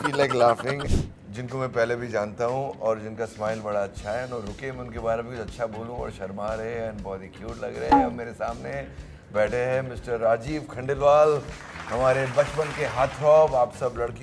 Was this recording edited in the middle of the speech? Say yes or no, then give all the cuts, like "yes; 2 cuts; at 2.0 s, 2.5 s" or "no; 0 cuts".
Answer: yes; 1 cut; at 0.9 s